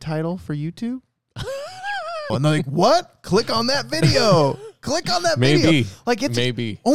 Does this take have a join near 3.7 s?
no; 1 cut; at 2.3 s

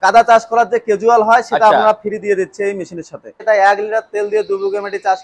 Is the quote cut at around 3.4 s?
yes; 1 cut; at 3.4 s

